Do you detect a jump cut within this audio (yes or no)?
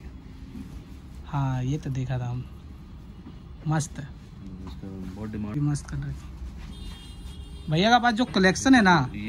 yes